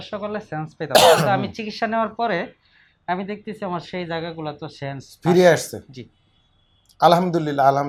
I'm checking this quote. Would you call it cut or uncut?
uncut